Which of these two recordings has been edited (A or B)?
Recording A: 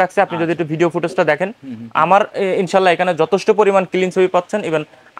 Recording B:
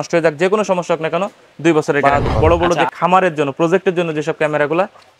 B